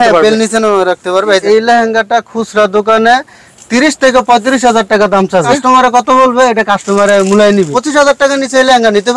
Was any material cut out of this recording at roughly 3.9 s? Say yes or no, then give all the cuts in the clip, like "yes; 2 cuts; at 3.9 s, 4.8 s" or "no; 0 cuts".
no; 3 cuts; at 1.4 s, 5.5 s, 7.8 s